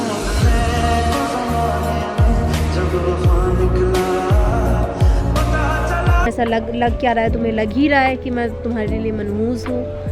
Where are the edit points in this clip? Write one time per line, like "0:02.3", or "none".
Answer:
0:06.3